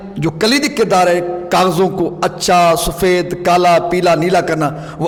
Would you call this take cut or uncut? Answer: uncut